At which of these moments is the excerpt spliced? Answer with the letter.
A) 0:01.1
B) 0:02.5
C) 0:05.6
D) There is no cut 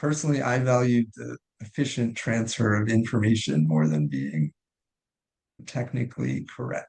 C